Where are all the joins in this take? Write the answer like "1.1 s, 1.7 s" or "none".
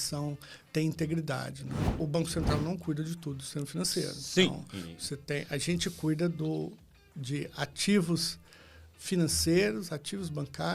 2.0 s